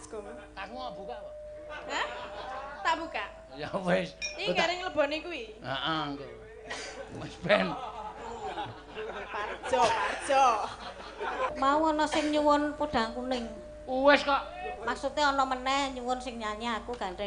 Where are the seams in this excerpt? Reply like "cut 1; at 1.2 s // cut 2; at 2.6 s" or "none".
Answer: cut 1; at 11.5 s